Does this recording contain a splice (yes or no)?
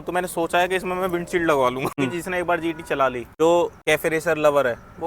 yes